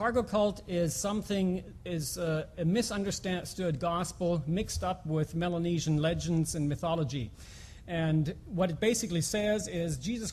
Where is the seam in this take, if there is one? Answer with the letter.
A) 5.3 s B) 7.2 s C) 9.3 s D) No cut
C